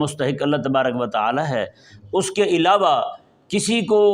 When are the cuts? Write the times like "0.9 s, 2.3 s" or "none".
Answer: none